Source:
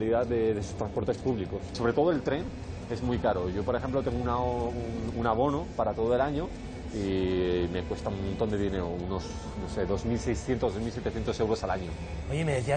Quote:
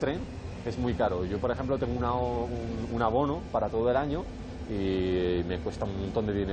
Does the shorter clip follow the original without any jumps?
yes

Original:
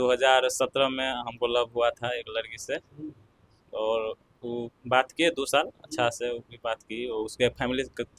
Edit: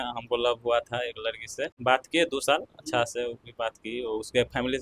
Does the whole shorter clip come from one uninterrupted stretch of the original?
no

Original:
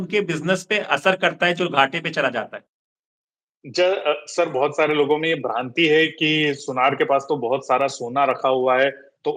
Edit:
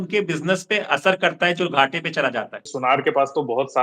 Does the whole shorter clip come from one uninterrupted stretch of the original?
no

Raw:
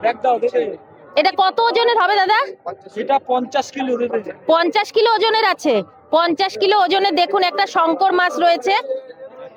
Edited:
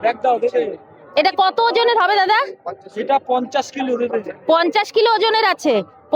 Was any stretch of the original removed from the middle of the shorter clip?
no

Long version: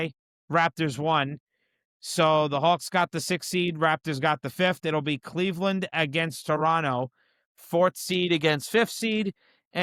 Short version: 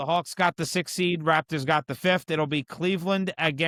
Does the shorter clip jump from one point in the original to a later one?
no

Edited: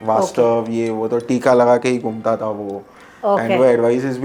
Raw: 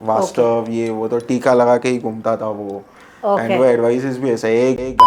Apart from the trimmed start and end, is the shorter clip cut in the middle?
no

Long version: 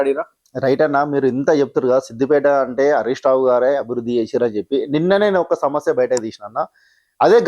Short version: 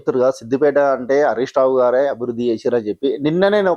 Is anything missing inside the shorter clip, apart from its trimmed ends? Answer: no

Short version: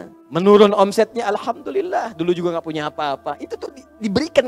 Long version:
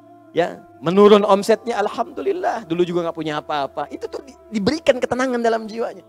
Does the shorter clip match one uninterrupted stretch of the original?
yes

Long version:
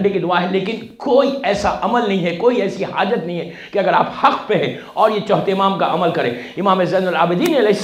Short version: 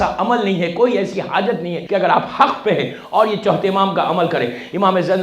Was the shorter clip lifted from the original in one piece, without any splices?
no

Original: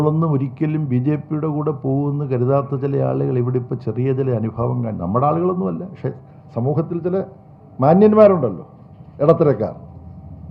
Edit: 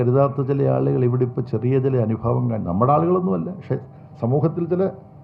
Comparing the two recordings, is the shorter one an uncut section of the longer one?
yes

